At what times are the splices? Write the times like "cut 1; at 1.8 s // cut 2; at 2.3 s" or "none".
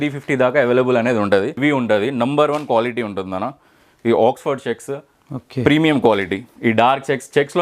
cut 1; at 1.6 s